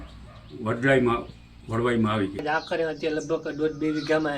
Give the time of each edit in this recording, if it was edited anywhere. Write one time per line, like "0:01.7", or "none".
0:02.4